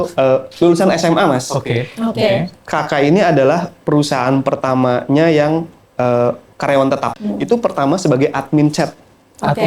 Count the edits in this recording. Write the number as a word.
one